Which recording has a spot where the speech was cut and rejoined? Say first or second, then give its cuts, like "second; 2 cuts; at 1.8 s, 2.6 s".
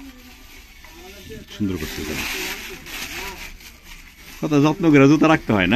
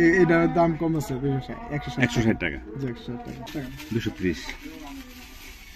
second; 1 cut; at 3.5 s